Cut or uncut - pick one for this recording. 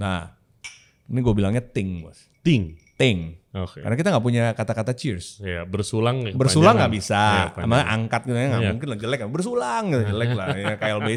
uncut